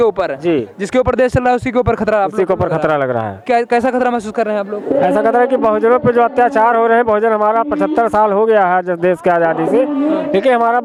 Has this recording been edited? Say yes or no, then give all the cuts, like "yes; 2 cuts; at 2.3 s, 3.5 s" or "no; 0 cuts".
no; 0 cuts